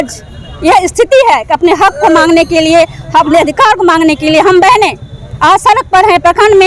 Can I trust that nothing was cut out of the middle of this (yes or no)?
yes